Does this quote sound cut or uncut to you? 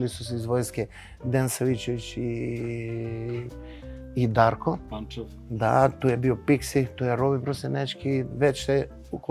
uncut